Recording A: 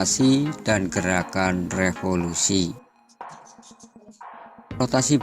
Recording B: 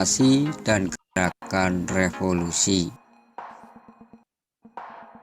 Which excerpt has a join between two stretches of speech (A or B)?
A